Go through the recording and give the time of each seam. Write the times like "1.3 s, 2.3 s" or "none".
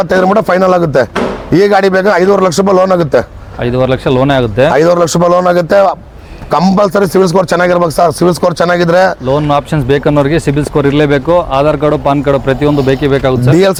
none